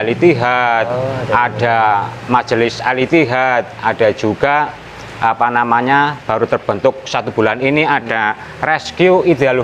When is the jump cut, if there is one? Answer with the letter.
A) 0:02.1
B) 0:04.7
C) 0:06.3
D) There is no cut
D